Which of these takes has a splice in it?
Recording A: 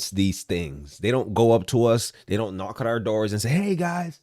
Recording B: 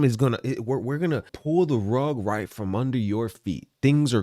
B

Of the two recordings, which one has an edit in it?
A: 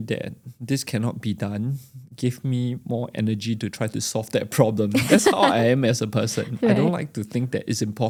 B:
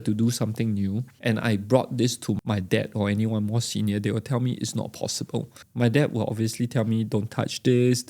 B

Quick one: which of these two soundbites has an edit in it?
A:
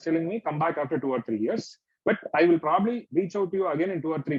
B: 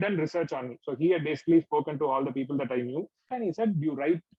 B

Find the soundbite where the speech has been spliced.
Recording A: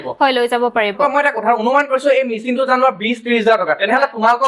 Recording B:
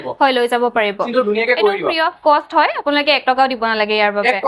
B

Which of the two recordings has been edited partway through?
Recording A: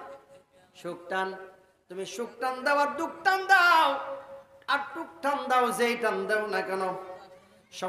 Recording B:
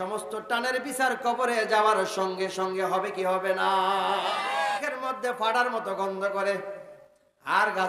B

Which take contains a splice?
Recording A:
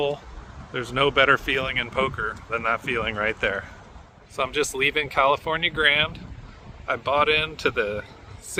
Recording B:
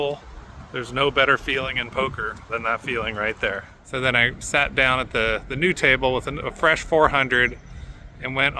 B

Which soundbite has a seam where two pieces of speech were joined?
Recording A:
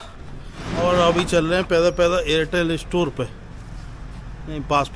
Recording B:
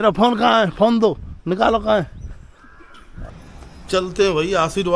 B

